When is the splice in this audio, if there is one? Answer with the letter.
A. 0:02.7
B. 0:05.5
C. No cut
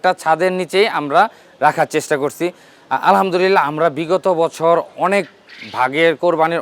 C